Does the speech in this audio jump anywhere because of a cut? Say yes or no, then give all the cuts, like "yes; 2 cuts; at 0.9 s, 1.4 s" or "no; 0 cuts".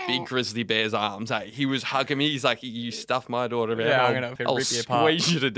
yes; 1 cut; at 4.3 s